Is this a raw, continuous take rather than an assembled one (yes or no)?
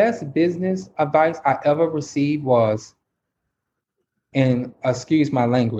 yes